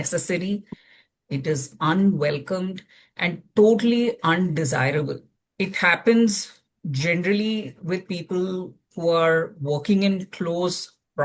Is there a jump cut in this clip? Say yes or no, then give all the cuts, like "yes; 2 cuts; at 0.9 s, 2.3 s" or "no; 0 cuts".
no; 0 cuts